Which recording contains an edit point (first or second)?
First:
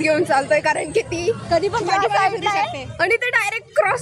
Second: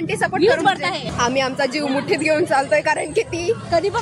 second